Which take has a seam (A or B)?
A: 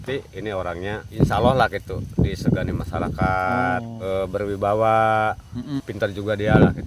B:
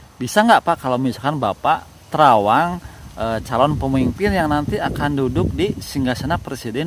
A